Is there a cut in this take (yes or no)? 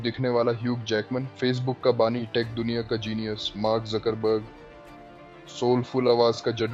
no